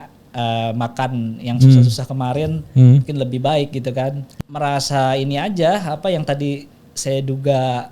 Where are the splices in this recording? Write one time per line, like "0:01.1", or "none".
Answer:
0:04.3